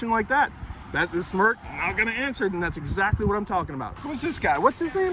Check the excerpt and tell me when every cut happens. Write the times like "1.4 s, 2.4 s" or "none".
4.0 s